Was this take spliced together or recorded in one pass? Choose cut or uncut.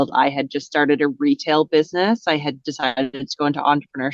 uncut